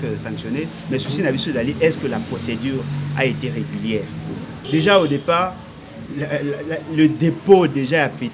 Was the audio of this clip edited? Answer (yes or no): yes